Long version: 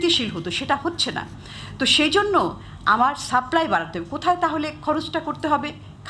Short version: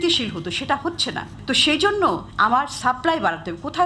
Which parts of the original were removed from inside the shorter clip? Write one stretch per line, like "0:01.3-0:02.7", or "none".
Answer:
0:01.3-0:01.6
0:02.6-0:02.8